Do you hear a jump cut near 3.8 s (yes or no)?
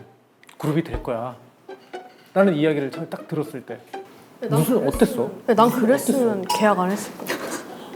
no